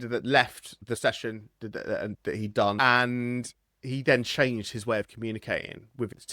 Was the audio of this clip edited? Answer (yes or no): yes